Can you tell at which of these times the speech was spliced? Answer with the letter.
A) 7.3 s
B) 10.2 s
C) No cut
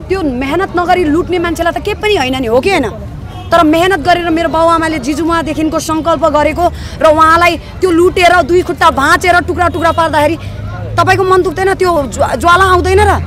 C